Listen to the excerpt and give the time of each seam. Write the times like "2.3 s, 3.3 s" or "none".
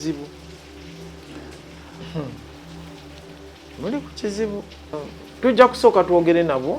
5.0 s